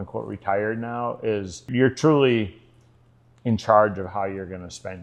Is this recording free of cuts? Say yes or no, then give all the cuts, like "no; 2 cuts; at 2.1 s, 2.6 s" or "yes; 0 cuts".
no; 1 cut; at 1.7 s